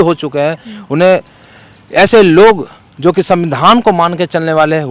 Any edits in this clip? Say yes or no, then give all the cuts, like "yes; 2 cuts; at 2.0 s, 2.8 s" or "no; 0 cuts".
no; 0 cuts